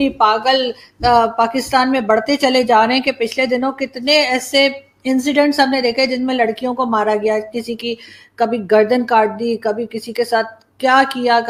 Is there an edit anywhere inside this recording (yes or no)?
no